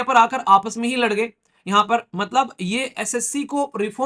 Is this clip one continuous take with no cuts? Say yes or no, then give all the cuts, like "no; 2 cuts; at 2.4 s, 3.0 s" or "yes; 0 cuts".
yes; 0 cuts